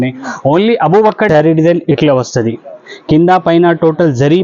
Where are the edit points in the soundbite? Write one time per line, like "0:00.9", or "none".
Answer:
0:01.3

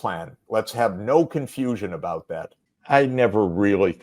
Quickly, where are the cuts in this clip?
0:02.6

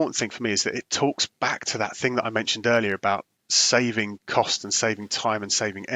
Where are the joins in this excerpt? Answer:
none

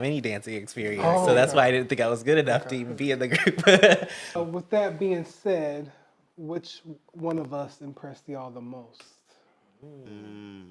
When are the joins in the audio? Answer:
0:04.4

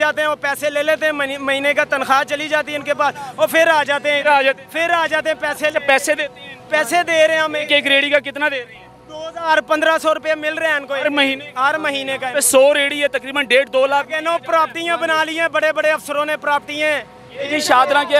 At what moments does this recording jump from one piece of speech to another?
none

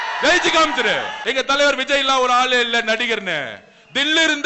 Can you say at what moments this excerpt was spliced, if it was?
0:01.1

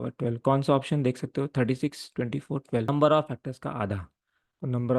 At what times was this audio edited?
0:02.9

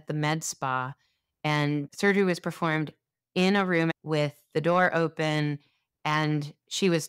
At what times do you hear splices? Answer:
0:01.9
0:04.0

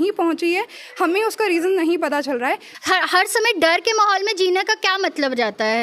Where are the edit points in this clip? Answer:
0:02.7

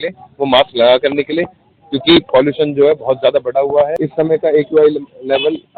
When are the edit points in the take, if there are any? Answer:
0:04.0

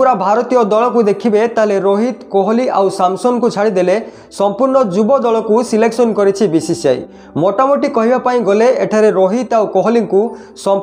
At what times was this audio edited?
none

